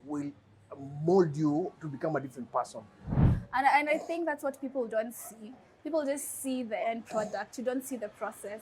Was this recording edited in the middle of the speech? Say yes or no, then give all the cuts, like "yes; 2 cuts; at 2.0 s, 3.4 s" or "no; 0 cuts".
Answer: yes; 1 cut; at 3.2 s